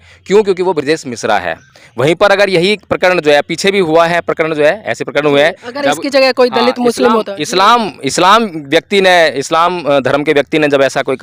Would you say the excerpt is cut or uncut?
uncut